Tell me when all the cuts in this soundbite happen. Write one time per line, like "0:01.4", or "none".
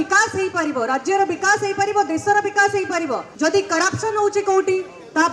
0:03.2